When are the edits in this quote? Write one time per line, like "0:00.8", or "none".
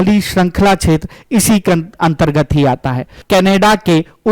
0:03.1

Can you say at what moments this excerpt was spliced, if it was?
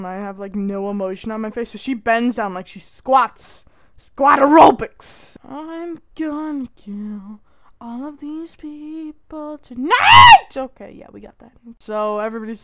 0:05.4
0:11.7

